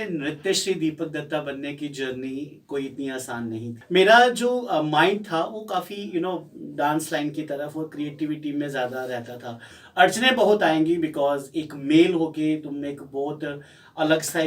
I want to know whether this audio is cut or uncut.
cut